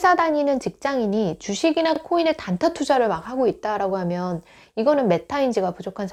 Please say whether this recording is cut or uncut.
uncut